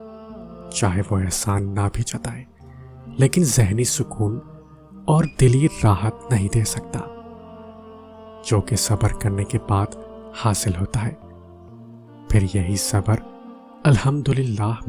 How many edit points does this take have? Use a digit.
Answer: 0